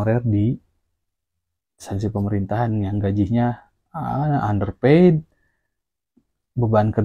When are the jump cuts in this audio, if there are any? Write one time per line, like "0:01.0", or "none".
none